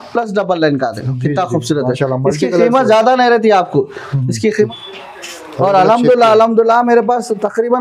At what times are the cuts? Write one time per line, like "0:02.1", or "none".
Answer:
0:04.5